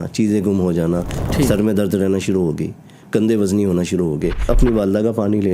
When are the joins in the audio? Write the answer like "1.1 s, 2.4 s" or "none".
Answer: 1.1 s, 4.4 s